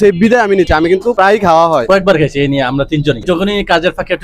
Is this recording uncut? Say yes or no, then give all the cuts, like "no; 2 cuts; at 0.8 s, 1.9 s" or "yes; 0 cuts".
no; 1 cut; at 1.8 s